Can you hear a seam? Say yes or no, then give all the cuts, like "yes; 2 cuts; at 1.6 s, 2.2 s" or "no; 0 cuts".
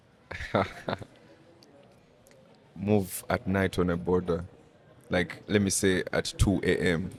no; 0 cuts